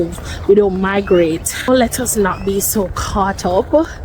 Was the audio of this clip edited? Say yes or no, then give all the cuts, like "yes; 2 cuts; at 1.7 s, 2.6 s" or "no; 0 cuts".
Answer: yes; 1 cut; at 1.7 s